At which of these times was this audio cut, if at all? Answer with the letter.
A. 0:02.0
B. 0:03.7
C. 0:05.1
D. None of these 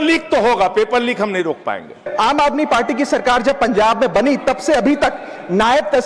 A